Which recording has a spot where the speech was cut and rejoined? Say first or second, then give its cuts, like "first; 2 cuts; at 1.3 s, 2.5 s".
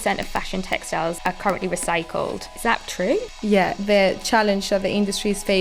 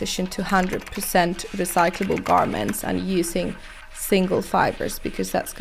first; 3 cuts; at 1.2 s, 2.5 s, 3.8 s